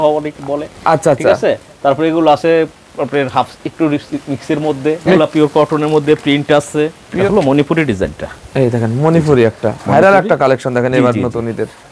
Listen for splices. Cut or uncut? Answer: cut